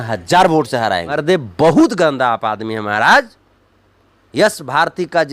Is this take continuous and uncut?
no; 1 cut; at 1.2 s

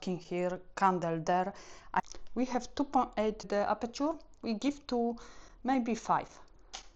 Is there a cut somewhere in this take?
yes; 1 cut; at 2.0 s

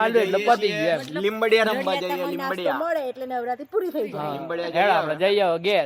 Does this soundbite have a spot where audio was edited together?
no; 0 cuts

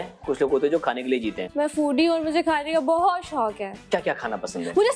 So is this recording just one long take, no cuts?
no; 1 cut; at 1.4 s

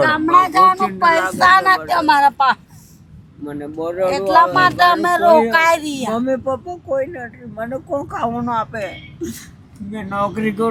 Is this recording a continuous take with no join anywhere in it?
yes; 0 cuts

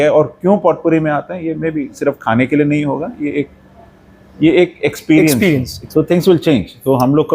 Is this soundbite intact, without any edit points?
no; 1 cut; at 5.8 s

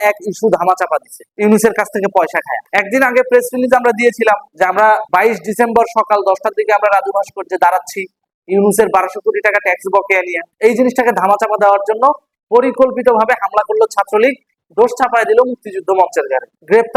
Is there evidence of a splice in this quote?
no; 0 cuts

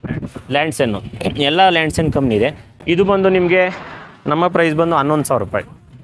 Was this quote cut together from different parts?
no; 0 cuts

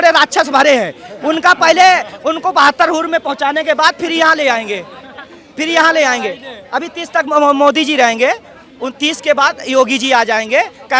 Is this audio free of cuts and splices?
yes; 0 cuts

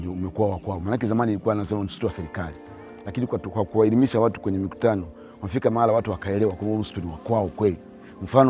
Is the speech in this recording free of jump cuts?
yes; 0 cuts

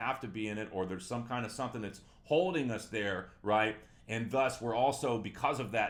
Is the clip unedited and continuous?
yes; 0 cuts

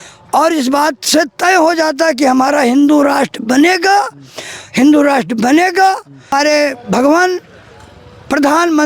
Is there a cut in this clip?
yes; 1 cut; at 6.3 s

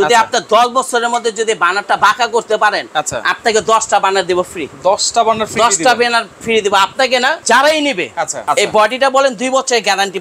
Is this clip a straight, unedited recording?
no; 2 cuts; at 7.4 s, 8.4 s

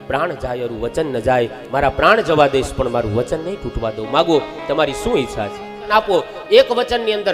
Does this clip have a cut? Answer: yes; 1 cut; at 5.9 s

